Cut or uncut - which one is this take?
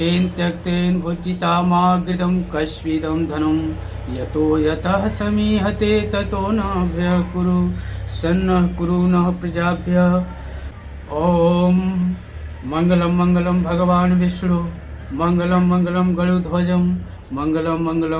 uncut